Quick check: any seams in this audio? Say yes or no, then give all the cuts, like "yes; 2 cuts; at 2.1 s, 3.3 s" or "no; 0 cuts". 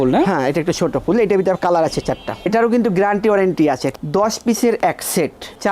yes; 2 cuts; at 2.5 s, 3.9 s